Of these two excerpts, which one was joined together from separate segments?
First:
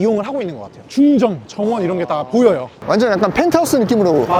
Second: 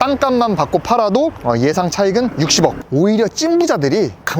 second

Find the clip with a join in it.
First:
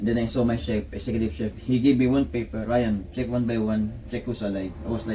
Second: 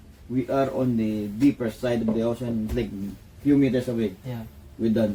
first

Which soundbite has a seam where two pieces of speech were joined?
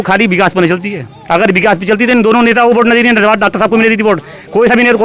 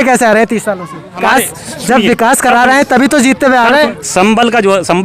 second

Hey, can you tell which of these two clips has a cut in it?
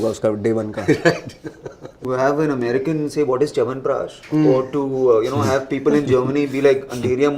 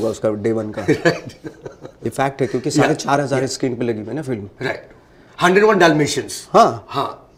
first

